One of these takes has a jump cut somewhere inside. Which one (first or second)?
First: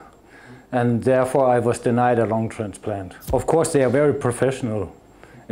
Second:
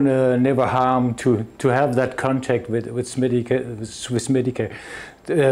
first